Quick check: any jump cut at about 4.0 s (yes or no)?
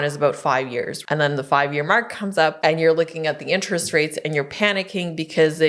no